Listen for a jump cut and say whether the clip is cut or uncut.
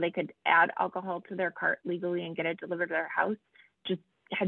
uncut